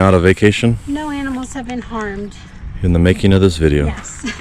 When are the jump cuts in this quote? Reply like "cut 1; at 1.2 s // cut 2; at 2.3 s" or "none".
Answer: cut 1; at 1.0 s